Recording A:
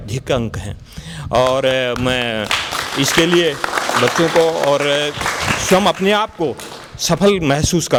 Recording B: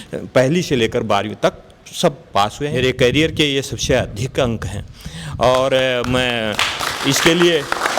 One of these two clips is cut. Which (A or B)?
B